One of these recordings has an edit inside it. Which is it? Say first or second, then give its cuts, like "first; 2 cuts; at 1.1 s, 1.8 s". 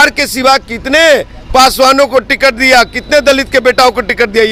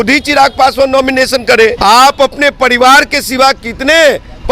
second; 1 cut; at 1.8 s